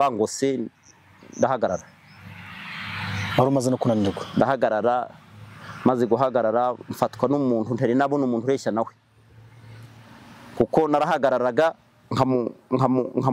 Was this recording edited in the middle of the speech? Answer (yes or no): no